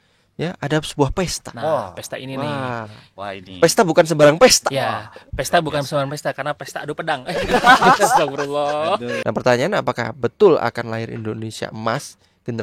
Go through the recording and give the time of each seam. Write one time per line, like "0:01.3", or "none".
0:09.1